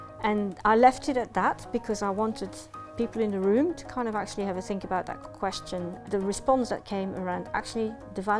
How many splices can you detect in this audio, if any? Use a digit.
1